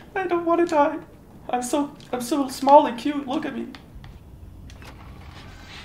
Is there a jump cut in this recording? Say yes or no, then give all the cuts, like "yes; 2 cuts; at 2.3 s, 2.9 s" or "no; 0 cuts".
yes; 1 cut; at 3.9 s